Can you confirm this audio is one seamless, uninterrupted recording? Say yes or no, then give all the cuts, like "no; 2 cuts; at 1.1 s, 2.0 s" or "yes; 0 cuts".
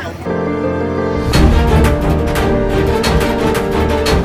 yes; 0 cuts